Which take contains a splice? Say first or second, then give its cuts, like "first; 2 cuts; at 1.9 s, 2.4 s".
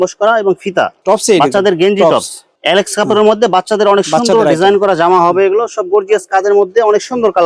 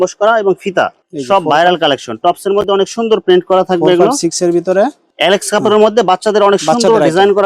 second; 2 cuts; at 1.0 s, 5.0 s